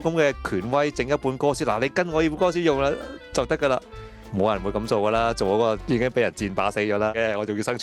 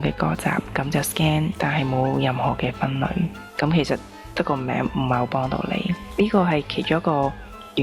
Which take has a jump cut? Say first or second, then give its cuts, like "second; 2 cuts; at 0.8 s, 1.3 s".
second; 3 cuts; at 1.5 s, 3.4 s, 6.0 s